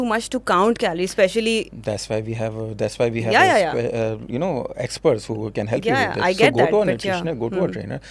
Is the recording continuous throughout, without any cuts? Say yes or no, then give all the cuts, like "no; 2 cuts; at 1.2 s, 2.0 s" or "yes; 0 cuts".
yes; 0 cuts